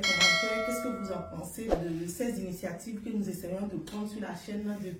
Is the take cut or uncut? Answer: cut